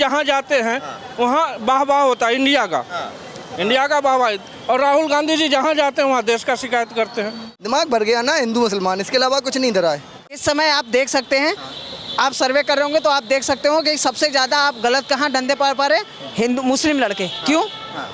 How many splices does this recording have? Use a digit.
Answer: 2